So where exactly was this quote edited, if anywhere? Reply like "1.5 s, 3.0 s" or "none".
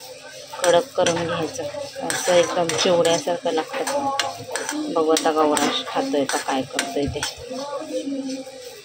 none